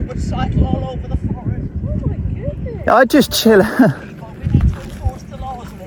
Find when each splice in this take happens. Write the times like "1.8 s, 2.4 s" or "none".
none